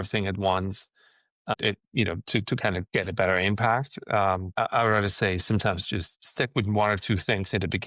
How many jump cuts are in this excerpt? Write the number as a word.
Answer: four